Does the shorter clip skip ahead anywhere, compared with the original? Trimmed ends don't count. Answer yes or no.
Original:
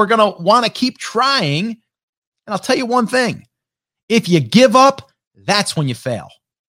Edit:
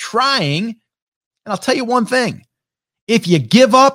no